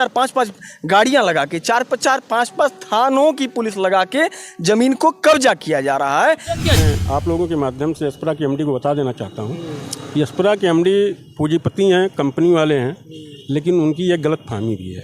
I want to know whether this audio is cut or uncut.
cut